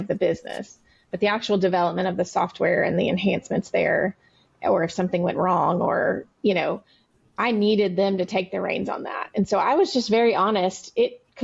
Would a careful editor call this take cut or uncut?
uncut